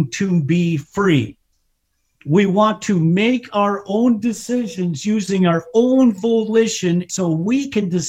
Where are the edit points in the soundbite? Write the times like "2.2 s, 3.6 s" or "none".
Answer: 7.1 s